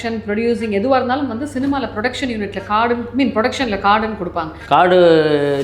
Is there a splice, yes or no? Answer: yes